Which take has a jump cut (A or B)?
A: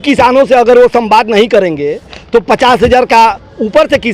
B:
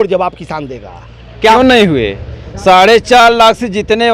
B